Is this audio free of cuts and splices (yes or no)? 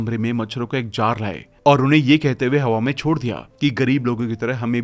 yes